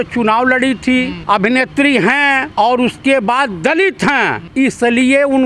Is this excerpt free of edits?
no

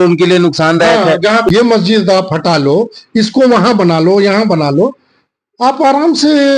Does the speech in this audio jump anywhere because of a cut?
yes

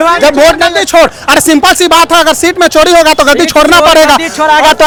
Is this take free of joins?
yes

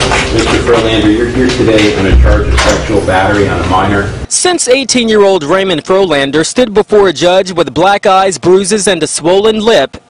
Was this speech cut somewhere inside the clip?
yes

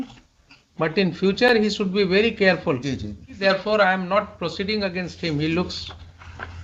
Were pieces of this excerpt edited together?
yes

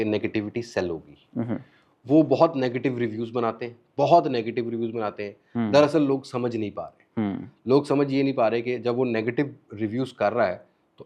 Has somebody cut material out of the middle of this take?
no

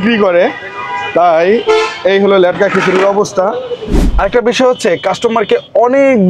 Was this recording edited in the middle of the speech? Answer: yes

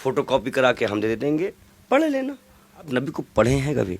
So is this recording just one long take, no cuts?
no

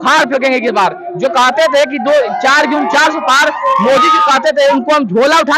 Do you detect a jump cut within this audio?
no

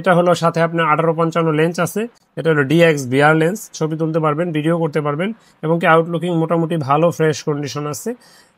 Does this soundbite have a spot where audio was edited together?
no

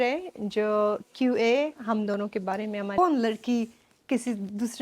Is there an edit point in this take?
yes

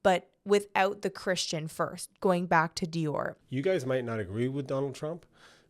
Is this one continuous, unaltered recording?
no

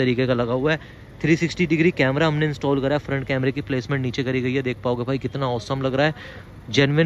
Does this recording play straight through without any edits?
yes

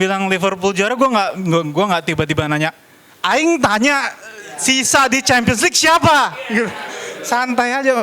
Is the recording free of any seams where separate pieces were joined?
yes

